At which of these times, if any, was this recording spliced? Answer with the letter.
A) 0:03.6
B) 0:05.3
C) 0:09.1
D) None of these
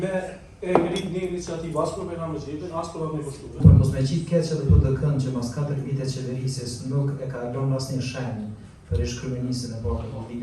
A